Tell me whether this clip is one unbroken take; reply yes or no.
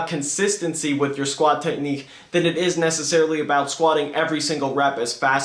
yes